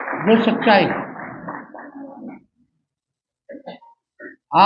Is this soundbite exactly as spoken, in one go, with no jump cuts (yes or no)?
yes